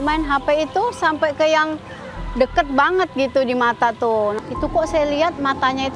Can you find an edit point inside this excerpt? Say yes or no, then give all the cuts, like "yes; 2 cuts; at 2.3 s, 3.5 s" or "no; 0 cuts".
yes; 1 cut; at 4.4 s